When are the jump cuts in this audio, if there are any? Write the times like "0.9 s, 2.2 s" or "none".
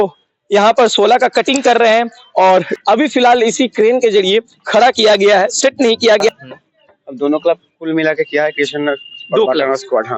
2.7 s, 6.3 s